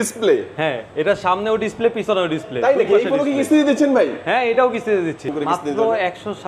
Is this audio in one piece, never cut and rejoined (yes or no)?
no